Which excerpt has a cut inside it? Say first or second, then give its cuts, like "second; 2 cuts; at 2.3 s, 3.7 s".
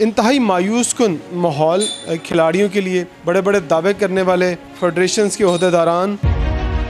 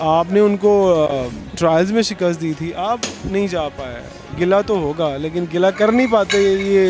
first; 3 cuts; at 1.3 s, 3.1 s, 4.7 s